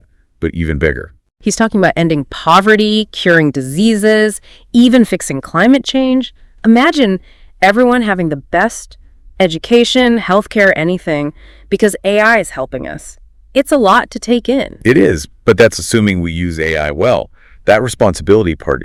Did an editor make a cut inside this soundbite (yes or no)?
no